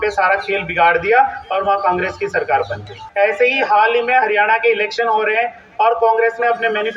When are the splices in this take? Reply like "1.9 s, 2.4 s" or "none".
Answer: 3.0 s